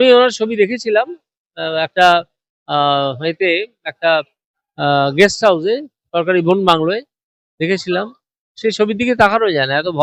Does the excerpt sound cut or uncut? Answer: uncut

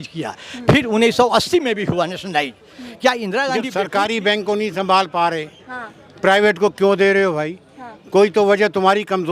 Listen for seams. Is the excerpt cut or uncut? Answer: cut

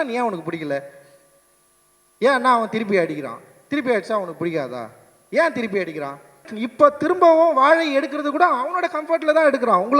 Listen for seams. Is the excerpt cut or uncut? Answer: cut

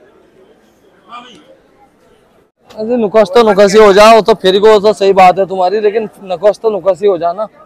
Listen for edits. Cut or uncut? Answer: cut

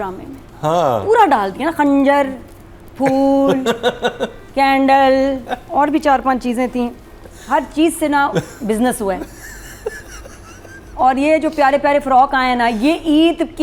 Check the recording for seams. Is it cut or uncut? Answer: uncut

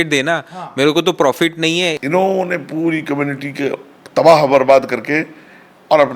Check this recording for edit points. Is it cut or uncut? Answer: cut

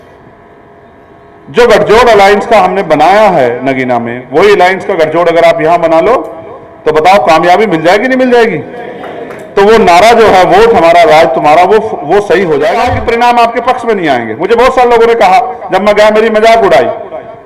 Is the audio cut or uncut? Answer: cut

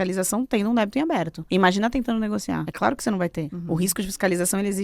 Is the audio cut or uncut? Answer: cut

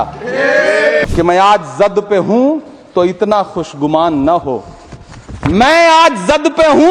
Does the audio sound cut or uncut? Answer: cut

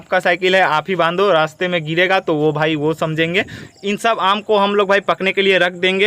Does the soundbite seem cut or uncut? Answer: cut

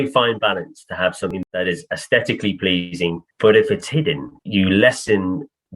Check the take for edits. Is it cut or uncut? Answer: cut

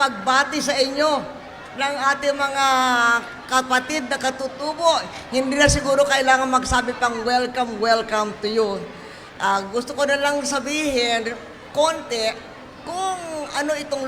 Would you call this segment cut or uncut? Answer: uncut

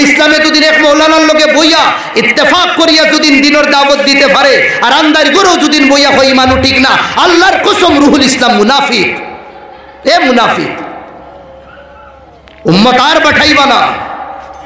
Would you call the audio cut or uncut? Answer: uncut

